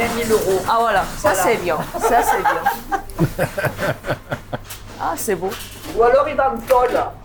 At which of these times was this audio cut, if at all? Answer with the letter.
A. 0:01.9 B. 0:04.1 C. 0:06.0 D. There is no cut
D